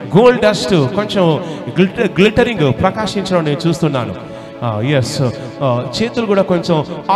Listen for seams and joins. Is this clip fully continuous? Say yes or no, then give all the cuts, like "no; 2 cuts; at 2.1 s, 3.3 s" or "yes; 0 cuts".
yes; 0 cuts